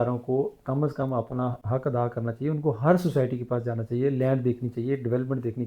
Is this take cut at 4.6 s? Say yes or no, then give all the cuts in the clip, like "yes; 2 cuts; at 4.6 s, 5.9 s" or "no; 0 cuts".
no; 1 cut; at 1.6 s